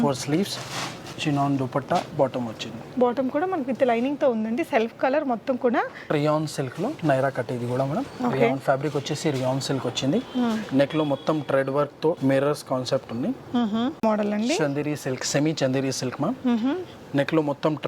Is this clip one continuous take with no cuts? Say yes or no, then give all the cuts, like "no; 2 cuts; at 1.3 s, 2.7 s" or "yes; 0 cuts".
no; 2 cuts; at 6.1 s, 14.0 s